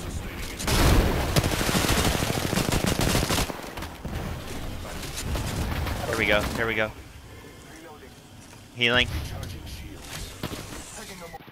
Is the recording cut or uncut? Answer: uncut